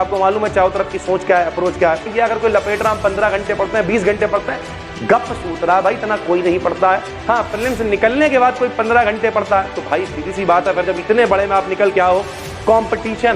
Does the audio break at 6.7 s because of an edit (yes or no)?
no